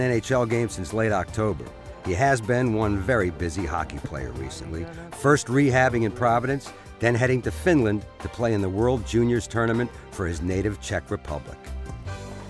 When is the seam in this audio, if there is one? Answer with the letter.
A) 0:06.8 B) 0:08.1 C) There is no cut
C